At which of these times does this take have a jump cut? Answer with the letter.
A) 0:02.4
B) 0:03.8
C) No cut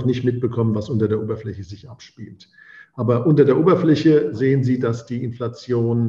C